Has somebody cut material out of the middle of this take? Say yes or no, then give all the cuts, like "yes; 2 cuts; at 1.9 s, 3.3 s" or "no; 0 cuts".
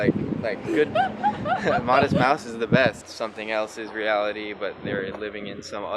yes; 1 cut; at 3.1 s